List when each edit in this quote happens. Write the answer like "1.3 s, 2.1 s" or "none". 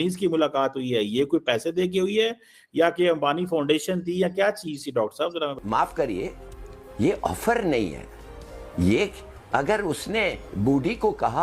5.6 s